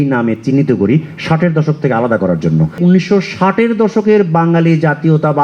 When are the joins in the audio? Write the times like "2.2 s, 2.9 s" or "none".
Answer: 2.8 s